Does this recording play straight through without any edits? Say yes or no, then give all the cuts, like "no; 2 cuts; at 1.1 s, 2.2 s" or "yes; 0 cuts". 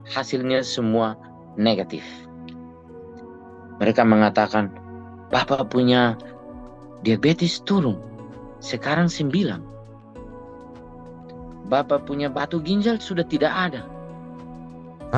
no; 2 cuts; at 2.0 s, 3.4 s